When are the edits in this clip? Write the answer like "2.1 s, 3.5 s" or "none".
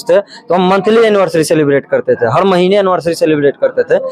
none

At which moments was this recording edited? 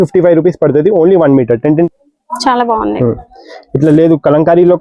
1.9 s

